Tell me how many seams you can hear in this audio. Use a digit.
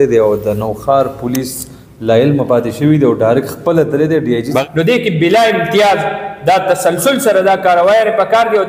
1